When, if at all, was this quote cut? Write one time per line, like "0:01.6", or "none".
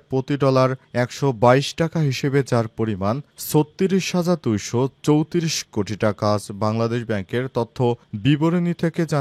none